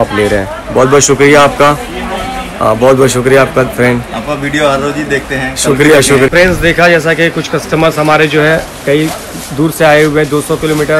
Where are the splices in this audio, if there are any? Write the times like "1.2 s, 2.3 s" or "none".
6.3 s